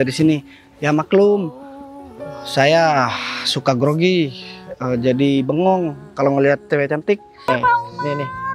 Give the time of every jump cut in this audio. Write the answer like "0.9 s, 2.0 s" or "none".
7.5 s